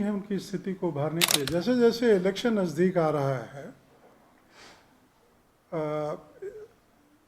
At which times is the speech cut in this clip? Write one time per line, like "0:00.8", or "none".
0:01.4